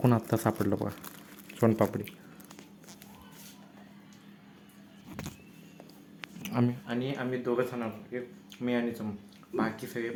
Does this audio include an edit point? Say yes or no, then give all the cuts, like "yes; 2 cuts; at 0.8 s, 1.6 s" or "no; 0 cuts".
no; 0 cuts